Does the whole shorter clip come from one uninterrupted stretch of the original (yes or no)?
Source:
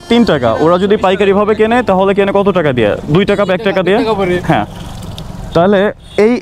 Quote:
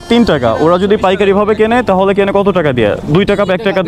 yes